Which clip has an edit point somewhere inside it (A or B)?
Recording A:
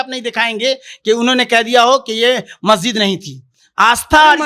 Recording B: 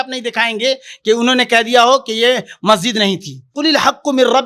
B